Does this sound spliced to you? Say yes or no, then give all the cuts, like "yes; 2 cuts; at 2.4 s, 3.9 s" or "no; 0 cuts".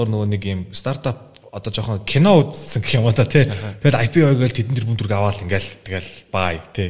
no; 0 cuts